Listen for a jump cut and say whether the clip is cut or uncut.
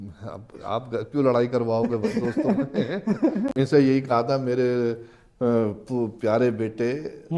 cut